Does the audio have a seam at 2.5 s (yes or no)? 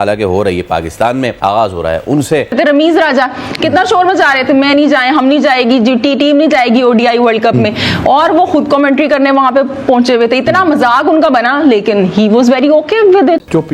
no